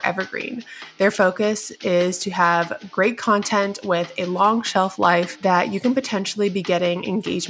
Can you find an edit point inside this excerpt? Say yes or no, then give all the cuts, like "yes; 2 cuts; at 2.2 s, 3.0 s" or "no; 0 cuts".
no; 0 cuts